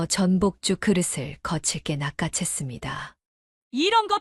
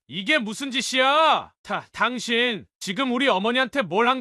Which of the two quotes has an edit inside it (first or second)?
second